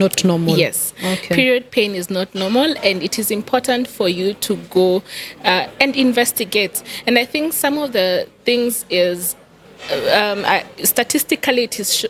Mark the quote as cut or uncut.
uncut